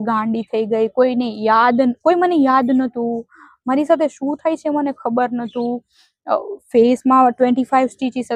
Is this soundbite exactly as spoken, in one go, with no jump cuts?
yes; 0 cuts

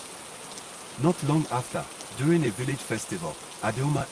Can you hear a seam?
no; 0 cuts

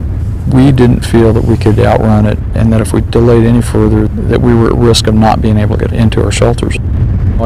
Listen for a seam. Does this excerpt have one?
yes; 1 cut; at 3.2 s

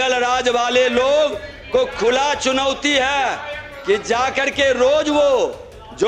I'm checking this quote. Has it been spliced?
no; 0 cuts

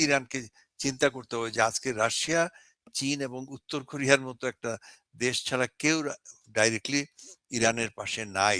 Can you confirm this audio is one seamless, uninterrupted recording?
yes; 0 cuts

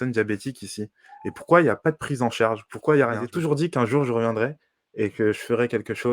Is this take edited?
yes; 1 cut; at 3.3 s

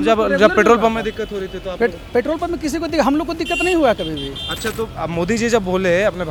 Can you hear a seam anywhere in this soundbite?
no; 0 cuts

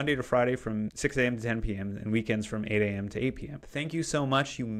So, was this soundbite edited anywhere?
yes; 2 cuts; at 0.9 s, 3.7 s

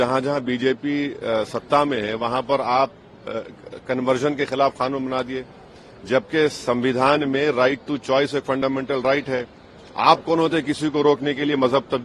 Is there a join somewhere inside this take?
no; 0 cuts

